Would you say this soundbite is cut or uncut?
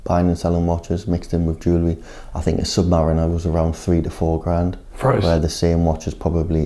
uncut